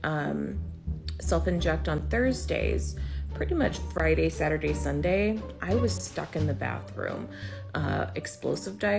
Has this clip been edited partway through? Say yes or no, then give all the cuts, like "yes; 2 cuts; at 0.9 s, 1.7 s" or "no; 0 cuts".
no; 0 cuts